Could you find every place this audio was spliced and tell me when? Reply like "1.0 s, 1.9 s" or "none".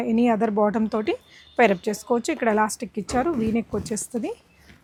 none